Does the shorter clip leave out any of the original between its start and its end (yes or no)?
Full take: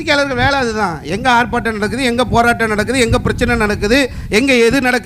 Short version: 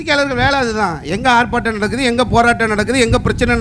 no